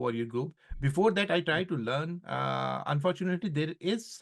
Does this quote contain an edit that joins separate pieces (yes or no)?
no